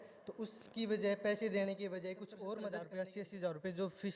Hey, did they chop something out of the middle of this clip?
yes; 1 cut; at 2.8 s

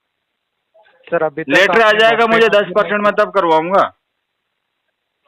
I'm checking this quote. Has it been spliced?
no; 0 cuts

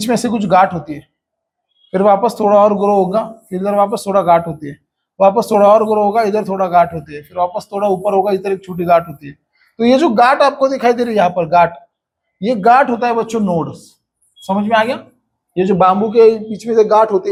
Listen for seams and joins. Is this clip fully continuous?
yes; 0 cuts

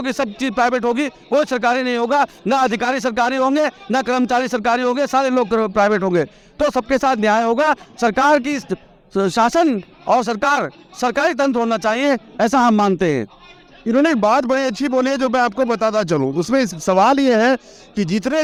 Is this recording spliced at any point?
no; 0 cuts

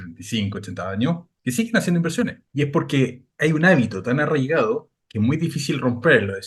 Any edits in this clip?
yes; 4 cuts; at 1.3 s, 2.4 s, 3.2 s, 5.0 s

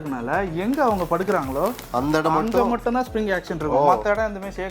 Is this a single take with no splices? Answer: yes; 0 cuts

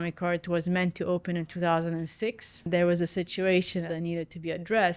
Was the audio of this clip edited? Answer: yes; 2 cuts; at 2.7 s, 3.8 s

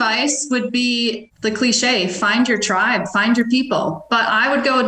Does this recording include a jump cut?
yes; 1 cut; at 1.2 s

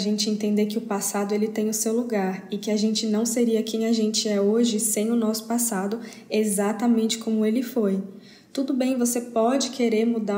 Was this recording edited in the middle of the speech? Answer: no; 0 cuts

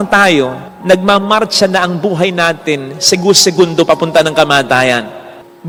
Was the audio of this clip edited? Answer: no; 0 cuts

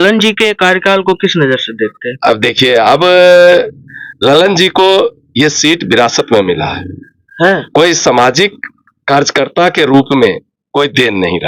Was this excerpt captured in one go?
yes; 0 cuts

